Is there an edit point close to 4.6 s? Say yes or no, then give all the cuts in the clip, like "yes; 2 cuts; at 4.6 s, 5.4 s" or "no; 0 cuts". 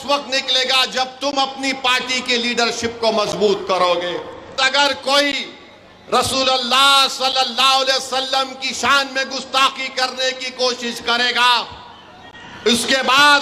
yes; 1 cut; at 4.6 s